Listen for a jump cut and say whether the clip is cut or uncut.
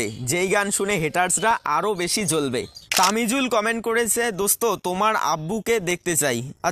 cut